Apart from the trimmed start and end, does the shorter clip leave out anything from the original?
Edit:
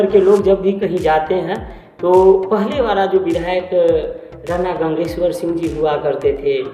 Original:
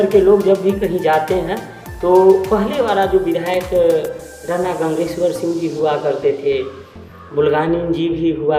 no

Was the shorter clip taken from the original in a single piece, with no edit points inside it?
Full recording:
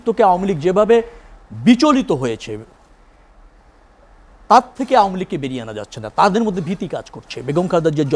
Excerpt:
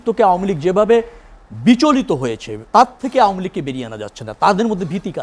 no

